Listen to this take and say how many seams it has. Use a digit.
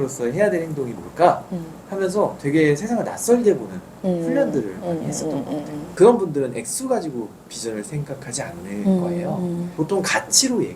2